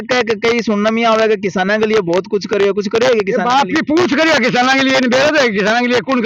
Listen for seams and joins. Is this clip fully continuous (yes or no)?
yes